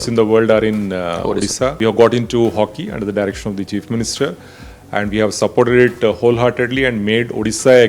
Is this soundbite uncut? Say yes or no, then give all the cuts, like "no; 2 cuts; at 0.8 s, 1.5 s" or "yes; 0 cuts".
no; 1 cut; at 1.8 s